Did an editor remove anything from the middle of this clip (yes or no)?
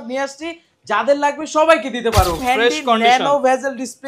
yes